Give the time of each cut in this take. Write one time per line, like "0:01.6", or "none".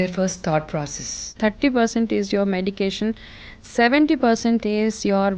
0:01.3